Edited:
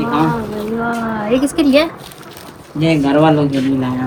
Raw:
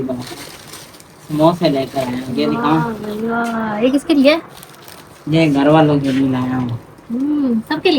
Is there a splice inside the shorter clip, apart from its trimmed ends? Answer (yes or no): no